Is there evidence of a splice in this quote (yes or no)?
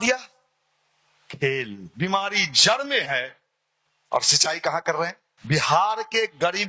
yes